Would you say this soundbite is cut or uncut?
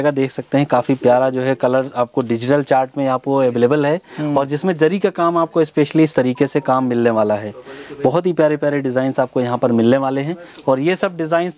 uncut